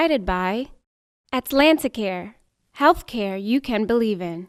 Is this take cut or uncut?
uncut